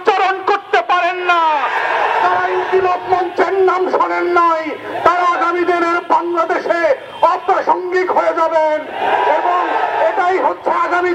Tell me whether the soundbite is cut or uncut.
uncut